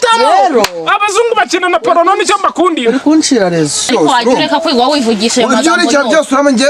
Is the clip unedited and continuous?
no; 1 cut; at 3.9 s

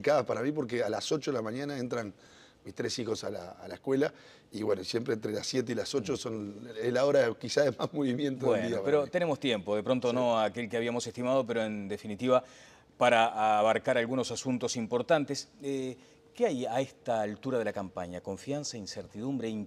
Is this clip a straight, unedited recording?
yes; 0 cuts

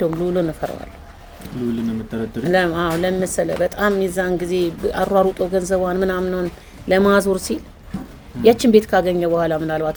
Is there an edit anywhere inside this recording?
no; 0 cuts

